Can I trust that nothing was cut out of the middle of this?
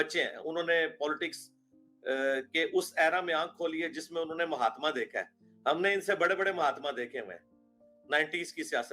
yes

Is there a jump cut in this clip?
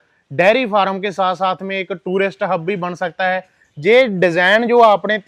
no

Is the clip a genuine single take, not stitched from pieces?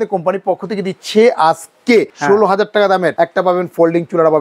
no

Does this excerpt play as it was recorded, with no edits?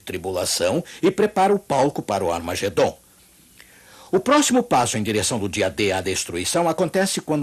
no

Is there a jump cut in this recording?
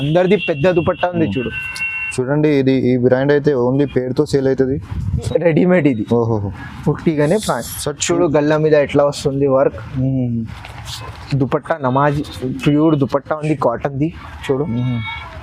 yes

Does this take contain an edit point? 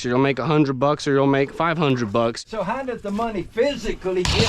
yes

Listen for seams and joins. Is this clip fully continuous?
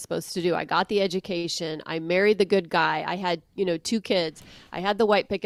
yes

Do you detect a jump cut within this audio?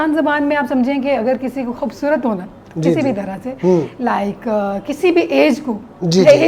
no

